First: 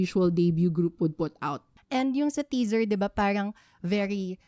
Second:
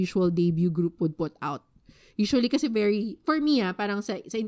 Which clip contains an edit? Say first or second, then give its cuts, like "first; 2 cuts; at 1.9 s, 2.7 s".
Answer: first; 1 cut; at 2.1 s